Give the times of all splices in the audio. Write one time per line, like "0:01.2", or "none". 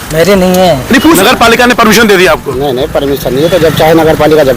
0:01.2